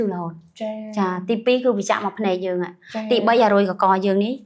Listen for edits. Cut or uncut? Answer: uncut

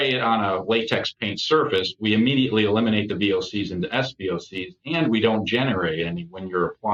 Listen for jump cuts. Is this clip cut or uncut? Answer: uncut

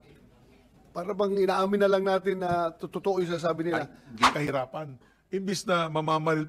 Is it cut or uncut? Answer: cut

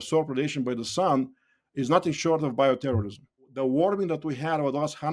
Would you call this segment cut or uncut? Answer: cut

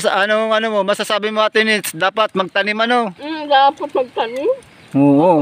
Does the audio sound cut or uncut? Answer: uncut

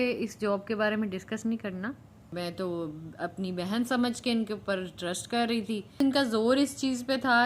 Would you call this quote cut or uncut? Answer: cut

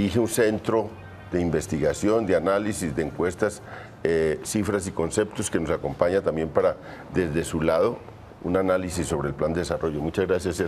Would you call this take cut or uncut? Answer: cut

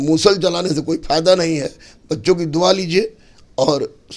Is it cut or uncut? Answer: uncut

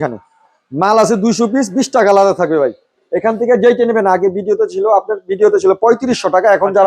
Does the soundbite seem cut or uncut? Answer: uncut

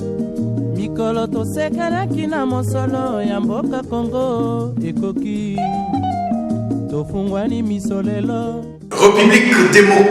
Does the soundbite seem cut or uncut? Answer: cut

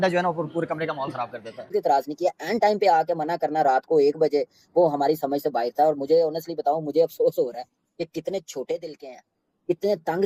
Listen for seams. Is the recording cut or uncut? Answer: cut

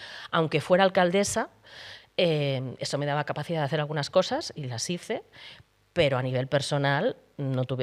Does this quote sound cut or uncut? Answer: uncut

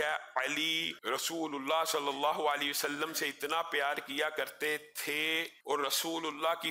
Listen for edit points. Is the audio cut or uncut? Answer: cut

